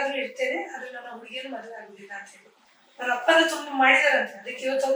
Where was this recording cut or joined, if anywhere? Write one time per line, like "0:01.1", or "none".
0:03.1